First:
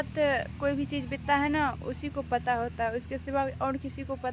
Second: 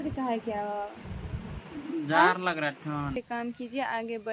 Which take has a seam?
second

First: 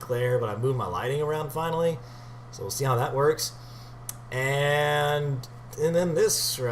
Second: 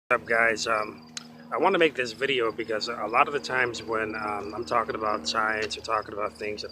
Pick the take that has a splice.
first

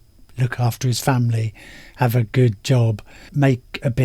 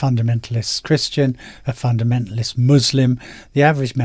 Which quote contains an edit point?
first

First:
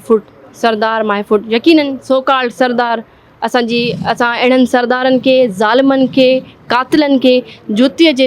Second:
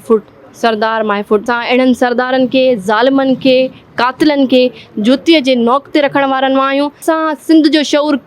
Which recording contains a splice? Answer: second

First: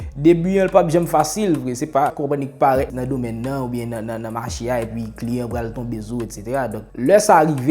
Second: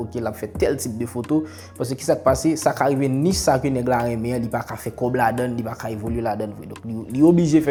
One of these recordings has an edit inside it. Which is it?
first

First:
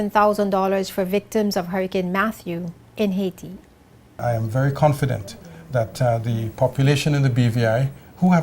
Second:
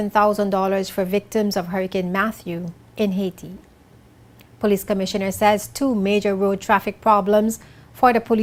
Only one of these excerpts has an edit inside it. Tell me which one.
first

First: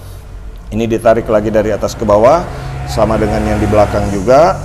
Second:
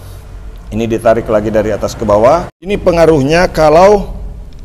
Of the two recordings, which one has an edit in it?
second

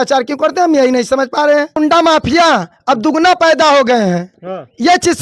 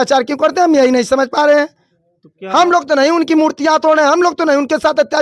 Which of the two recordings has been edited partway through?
first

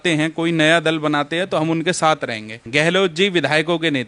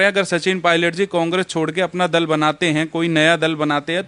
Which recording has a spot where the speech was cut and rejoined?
first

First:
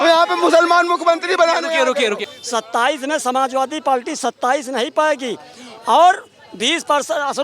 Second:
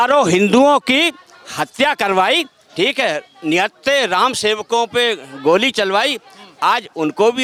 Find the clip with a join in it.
first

